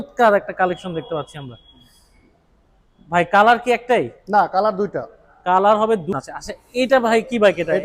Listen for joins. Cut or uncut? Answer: cut